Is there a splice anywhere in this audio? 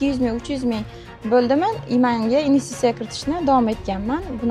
no; 0 cuts

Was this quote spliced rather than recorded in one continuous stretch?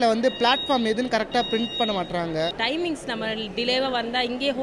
yes; 1 cut; at 2.6 s

